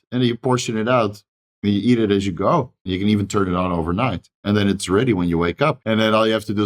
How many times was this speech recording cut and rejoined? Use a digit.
3